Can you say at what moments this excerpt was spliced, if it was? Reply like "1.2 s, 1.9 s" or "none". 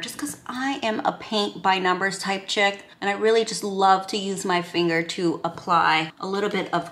none